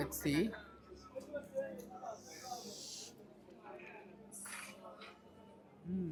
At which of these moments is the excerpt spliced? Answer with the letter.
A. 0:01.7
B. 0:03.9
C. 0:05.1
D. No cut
D